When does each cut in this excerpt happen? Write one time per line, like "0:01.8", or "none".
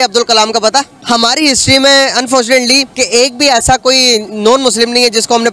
0:00.9